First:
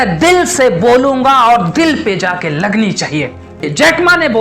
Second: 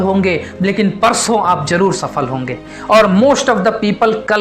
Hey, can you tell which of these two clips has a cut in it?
first; 1 cut; at 3.5 s

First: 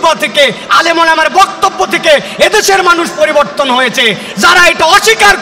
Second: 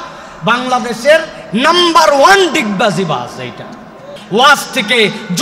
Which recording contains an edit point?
second; 1 cut; at 4.1 s

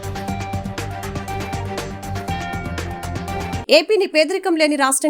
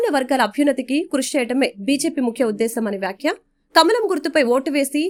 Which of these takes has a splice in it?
first; 1 cut; at 3.6 s

